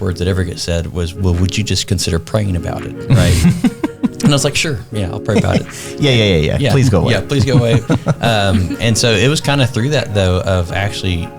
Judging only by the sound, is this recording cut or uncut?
uncut